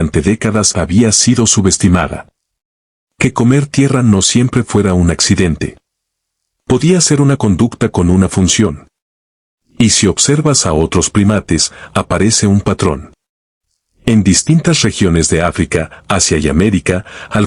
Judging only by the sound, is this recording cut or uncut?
cut